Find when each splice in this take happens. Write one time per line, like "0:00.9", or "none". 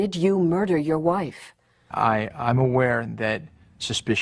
0:01.9